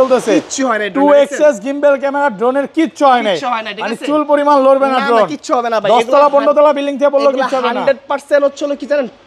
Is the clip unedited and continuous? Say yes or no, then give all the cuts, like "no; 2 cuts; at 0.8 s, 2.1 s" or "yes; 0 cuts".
yes; 0 cuts